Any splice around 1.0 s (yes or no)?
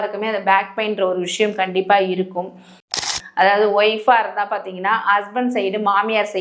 no